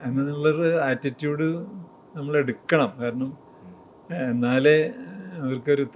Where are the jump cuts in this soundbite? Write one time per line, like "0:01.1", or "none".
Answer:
none